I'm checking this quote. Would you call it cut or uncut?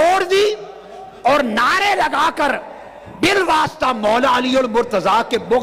uncut